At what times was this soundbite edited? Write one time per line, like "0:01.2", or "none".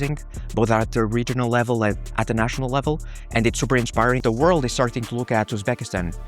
0:04.2